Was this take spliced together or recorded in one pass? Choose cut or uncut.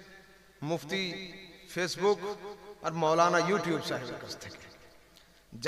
uncut